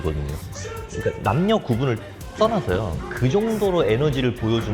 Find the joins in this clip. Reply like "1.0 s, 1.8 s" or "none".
0.9 s